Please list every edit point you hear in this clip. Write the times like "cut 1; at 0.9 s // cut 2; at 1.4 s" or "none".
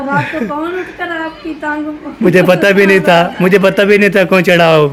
none